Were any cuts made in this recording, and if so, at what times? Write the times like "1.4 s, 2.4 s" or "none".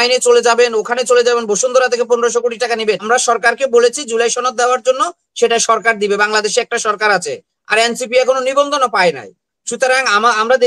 3.0 s